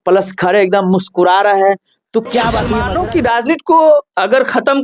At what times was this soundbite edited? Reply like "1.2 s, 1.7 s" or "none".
2.8 s